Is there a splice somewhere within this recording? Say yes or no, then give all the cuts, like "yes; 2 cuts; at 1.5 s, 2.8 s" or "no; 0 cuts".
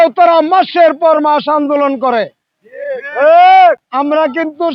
no; 0 cuts